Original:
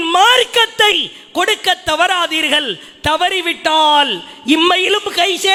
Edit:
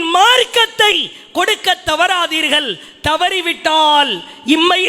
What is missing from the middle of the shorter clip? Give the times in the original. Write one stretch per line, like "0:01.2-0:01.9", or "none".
none